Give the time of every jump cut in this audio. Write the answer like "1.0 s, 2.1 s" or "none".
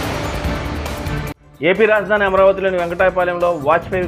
none